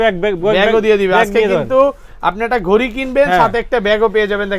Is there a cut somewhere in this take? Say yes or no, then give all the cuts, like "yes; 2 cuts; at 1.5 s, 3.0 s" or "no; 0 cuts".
no; 0 cuts